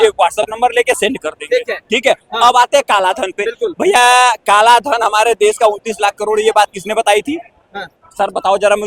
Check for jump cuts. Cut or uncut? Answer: uncut